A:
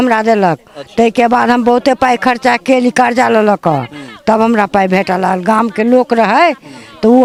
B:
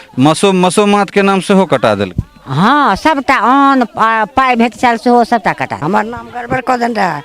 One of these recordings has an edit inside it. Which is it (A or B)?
B